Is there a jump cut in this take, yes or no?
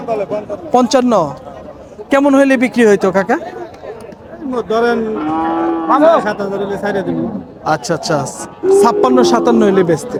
no